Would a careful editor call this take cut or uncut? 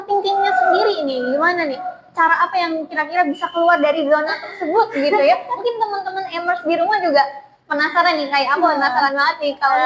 uncut